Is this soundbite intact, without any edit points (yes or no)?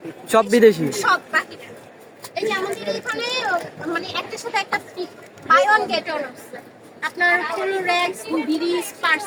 yes